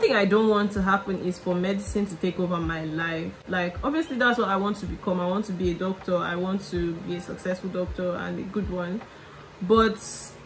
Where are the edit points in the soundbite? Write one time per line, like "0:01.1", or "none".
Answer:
none